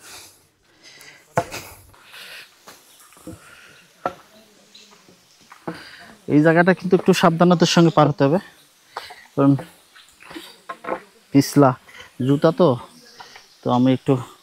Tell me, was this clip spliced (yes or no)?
yes